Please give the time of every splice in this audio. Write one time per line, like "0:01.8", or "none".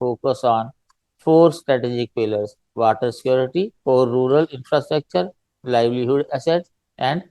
0:03.7